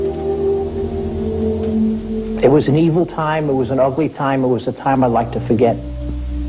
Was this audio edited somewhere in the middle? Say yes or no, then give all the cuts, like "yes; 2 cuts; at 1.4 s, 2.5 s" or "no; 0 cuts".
no; 0 cuts